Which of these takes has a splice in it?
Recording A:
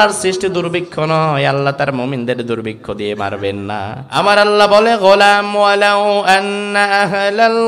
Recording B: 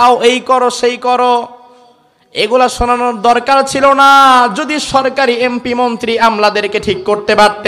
A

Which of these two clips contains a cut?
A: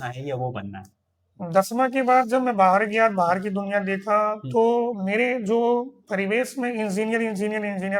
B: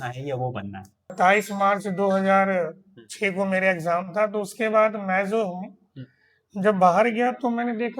B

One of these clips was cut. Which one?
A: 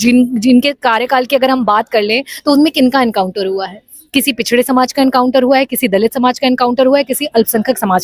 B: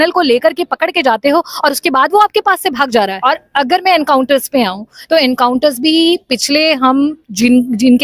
B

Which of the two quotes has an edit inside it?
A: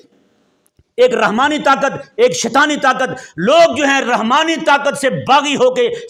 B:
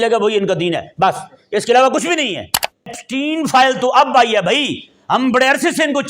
B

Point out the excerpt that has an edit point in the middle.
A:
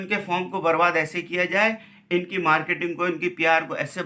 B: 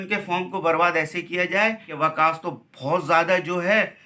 B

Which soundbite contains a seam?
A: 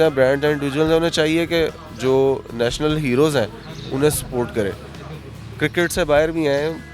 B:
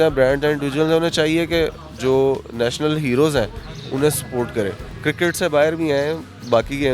B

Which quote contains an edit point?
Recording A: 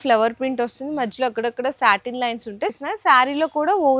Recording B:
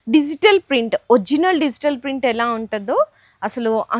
A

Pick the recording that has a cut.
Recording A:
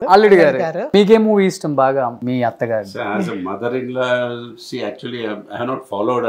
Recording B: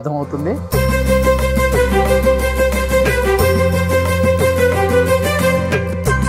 A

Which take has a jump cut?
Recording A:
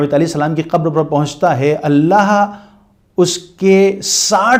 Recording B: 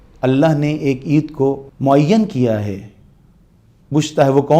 B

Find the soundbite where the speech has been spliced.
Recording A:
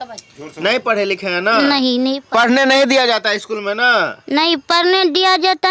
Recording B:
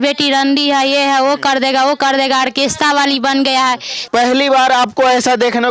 B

